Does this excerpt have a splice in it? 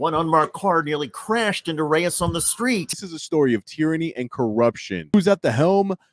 yes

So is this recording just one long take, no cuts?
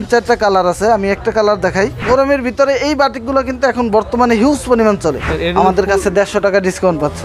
no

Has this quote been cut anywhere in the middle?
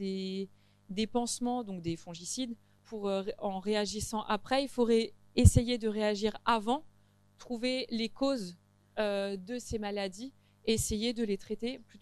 yes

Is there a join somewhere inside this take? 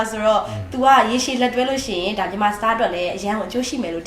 no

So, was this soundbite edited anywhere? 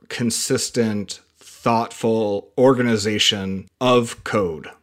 yes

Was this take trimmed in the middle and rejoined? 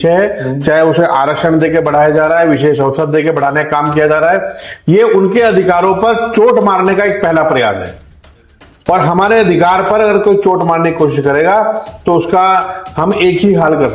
no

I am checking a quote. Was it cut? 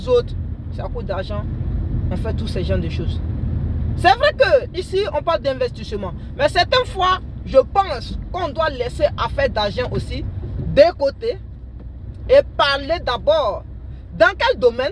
no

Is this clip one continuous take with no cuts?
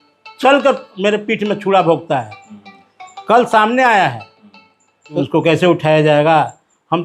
no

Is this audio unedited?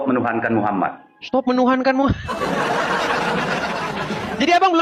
yes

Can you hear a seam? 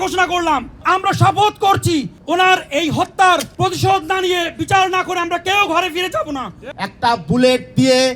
yes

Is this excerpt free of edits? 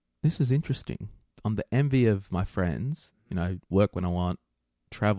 no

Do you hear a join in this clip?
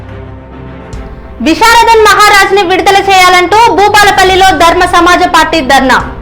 yes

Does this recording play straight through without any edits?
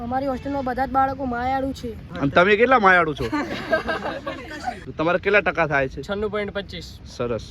no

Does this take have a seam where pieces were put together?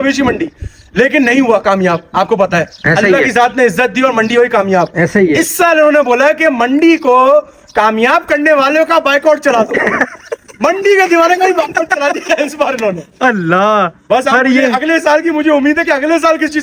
no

